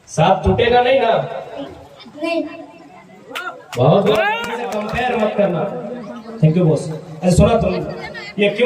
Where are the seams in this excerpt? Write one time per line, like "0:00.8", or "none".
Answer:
0:04.8